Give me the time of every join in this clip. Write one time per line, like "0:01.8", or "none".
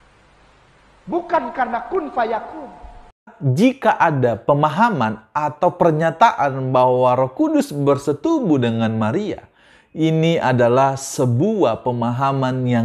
0:03.4